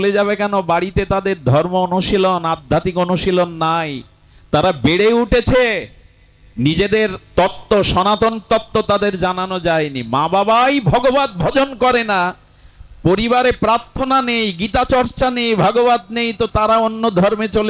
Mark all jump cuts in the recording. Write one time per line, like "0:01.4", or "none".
none